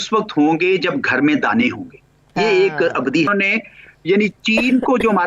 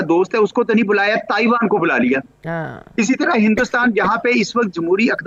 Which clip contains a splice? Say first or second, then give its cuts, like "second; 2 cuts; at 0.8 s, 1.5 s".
first; 1 cut; at 3.3 s